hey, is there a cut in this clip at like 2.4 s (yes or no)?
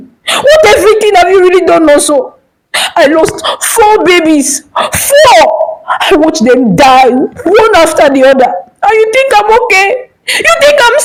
no